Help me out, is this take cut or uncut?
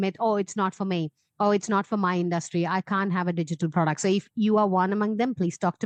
uncut